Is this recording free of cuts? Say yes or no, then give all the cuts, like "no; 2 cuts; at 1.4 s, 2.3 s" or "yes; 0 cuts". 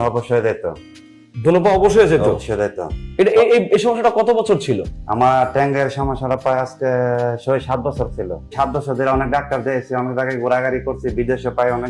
no; 1 cut; at 8.5 s